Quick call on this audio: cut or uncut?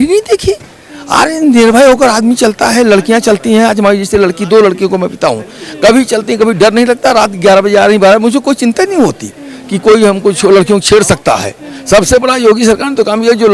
uncut